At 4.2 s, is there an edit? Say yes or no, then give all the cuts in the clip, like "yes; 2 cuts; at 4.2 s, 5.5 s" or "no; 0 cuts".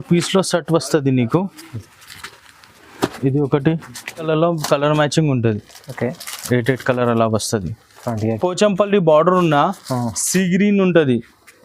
yes; 2 cuts; at 4.2 s, 8.4 s